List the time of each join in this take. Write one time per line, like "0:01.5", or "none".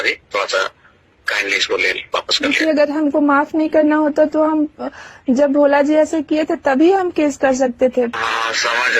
0:08.1